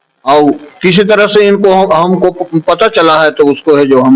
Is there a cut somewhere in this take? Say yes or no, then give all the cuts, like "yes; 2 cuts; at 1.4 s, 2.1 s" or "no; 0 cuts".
no; 0 cuts